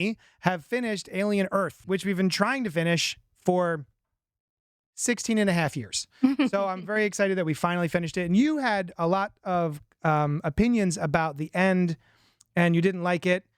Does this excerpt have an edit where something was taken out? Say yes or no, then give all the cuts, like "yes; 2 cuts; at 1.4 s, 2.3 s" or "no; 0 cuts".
yes; 1 cut; at 1.8 s